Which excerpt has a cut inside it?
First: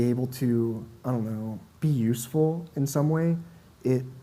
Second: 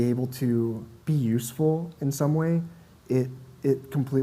second; 1 cut; at 0.9 s

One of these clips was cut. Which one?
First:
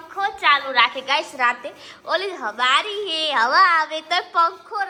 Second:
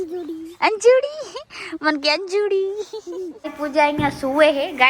second; 1 cut; at 3.5 s

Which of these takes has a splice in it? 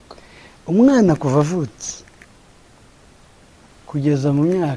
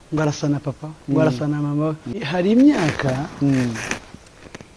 second; 1 cut; at 2.2 s

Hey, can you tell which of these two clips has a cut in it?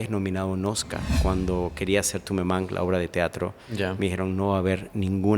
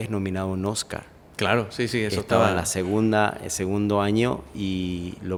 first; 1 cut; at 1.2 s

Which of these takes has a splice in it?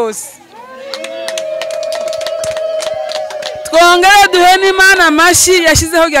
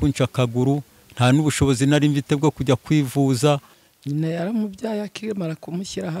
second; 1 cut; at 3.8 s

